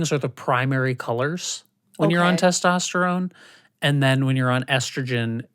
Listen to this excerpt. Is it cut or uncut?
uncut